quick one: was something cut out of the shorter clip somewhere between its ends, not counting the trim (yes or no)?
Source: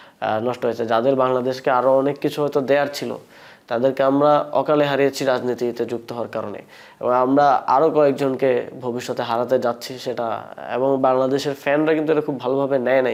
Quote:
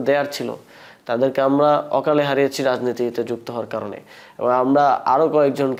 no